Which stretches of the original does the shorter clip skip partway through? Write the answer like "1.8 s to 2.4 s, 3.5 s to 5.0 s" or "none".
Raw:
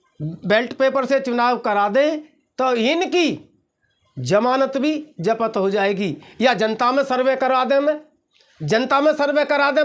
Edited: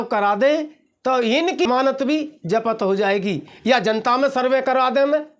3.2 s to 4.4 s